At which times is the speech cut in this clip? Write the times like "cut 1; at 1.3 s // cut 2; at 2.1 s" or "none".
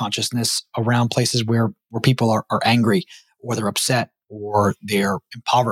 none

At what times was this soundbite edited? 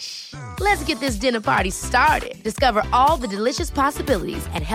none

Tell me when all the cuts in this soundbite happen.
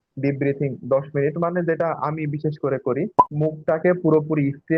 cut 1; at 3.2 s

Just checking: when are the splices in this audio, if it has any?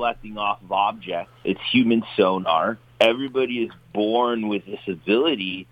cut 1; at 1.3 s // cut 2; at 2.8 s

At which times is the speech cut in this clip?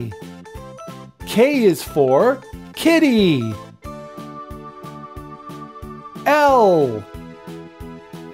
none

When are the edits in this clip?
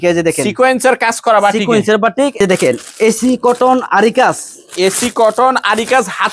cut 1; at 2.4 s

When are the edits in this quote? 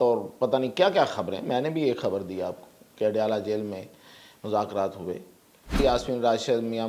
cut 1; at 5.8 s

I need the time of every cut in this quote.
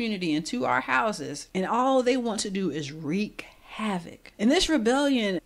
cut 1; at 1.4 s // cut 2; at 4.2 s

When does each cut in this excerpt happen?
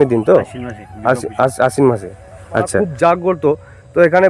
cut 1; at 2.8 s

